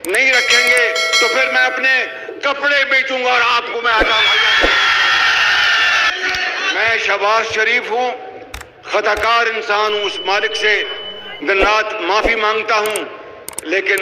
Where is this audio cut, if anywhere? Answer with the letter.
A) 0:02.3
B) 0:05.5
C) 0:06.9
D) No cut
C